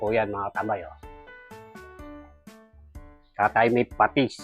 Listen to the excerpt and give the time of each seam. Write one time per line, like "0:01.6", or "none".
0:01.3
0:03.3